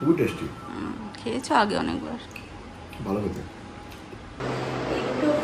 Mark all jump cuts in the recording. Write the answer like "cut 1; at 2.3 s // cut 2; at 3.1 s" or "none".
cut 1; at 4.4 s